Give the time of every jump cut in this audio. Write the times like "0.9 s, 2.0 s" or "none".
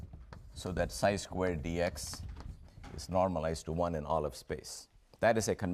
none